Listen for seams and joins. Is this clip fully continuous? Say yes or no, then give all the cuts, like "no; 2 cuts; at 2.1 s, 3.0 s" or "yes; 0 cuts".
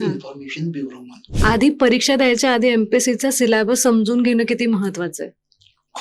no; 1 cut; at 1.3 s